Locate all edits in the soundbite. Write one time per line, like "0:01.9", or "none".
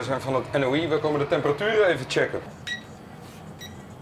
0:02.5

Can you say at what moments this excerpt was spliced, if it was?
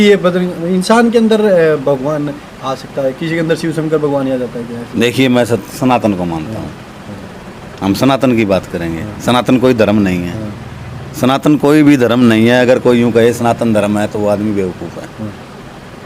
none

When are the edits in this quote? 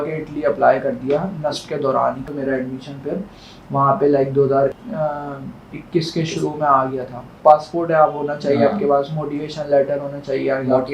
0:02.3
0:04.8
0:07.3

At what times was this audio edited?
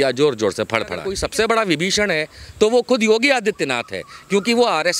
0:01.2

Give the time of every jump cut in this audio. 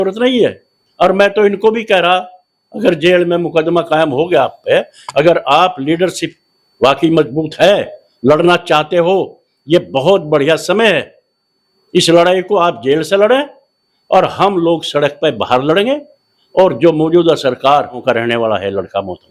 0:18.0

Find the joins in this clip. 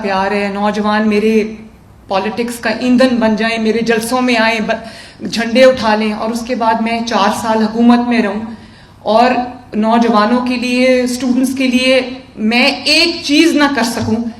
none

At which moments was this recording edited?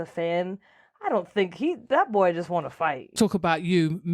0:03.1

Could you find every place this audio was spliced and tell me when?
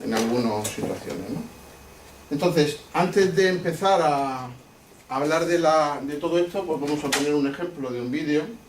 0:06.1

